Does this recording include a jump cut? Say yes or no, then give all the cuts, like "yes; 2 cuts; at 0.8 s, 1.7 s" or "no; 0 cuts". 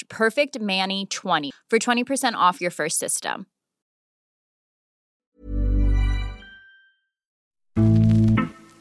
yes; 2 cuts; at 1.5 s, 7.8 s